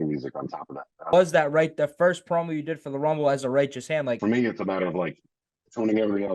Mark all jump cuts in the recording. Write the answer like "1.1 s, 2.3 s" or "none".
1.1 s, 4.2 s